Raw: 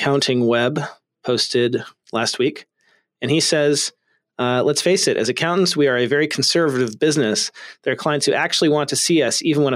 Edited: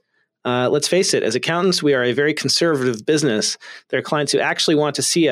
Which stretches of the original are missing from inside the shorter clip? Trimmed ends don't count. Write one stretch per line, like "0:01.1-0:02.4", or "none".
none